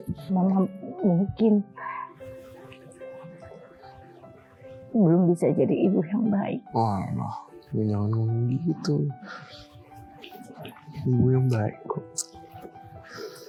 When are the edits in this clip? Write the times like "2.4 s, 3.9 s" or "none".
none